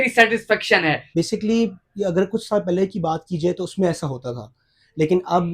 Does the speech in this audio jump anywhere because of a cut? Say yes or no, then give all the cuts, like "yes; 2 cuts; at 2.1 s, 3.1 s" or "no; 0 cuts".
yes; 1 cut; at 1.0 s